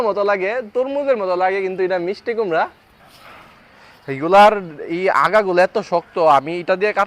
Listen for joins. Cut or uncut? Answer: cut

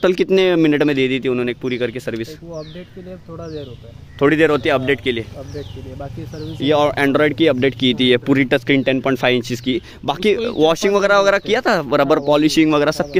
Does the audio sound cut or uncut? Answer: uncut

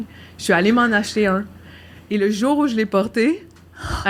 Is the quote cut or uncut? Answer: uncut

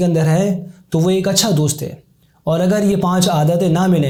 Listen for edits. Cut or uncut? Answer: uncut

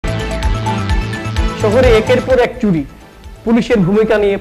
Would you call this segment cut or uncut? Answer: cut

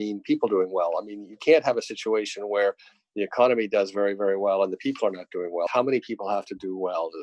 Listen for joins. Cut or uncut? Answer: cut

